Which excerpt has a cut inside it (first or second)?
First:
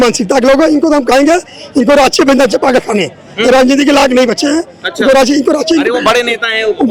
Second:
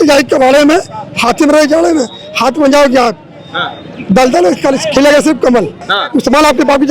second